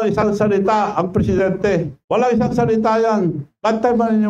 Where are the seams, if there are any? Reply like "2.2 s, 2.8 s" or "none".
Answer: 2.0 s